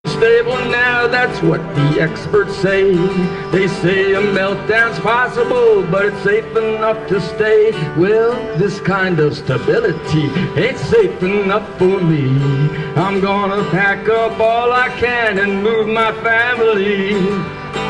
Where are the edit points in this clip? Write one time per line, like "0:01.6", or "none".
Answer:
0:13.0